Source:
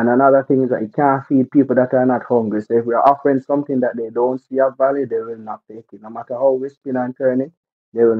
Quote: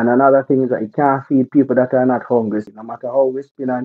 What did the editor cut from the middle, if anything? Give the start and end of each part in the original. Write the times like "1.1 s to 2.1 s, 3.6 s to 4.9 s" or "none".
2.6 s to 5.9 s